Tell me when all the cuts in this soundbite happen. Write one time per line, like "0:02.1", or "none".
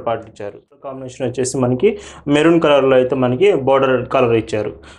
0:00.9

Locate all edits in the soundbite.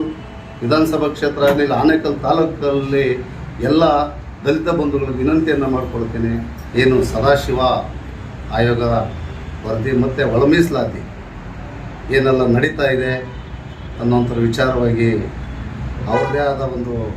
0:06.6

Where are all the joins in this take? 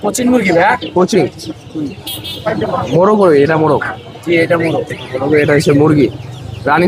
none

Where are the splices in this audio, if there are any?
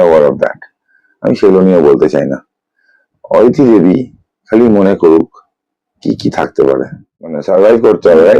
0:07.4

